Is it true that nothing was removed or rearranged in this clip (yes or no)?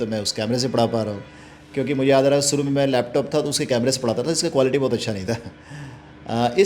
yes